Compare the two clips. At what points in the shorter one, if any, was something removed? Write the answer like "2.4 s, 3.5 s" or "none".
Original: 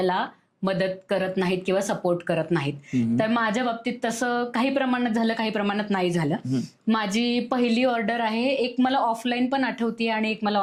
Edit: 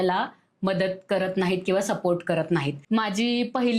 2.8 s